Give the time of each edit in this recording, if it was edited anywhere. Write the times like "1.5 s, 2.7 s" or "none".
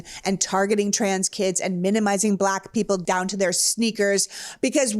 3.0 s